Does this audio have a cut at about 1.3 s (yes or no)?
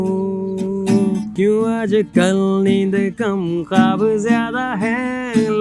yes